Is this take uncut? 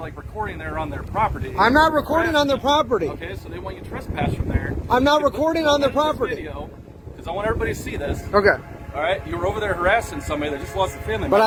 yes; 0 cuts

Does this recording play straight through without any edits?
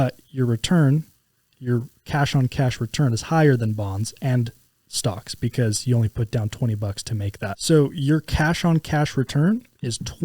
no; 1 cut; at 7.6 s

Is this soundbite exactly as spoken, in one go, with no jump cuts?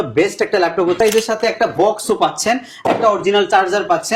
no; 1 cut; at 1.0 s

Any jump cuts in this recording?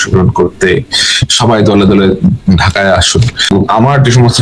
yes; 1 cut; at 3.4 s

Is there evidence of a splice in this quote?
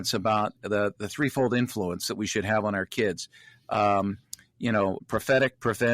yes; 1 cut; at 5.0 s

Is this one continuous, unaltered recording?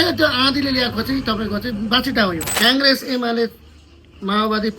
no; 1 cut; at 2.5 s

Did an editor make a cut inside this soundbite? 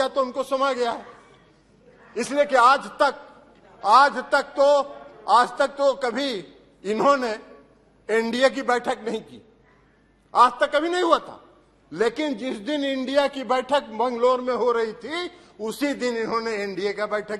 no; 0 cuts

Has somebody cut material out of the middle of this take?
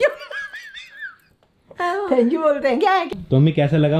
yes; 1 cut; at 3.1 s

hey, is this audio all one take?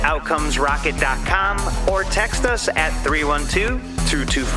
yes; 0 cuts

